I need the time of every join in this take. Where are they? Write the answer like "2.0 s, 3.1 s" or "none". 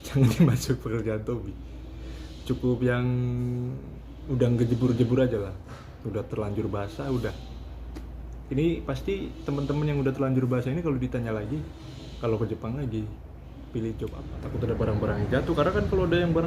14.3 s